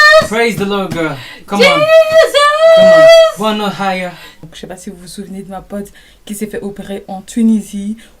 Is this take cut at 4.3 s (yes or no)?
yes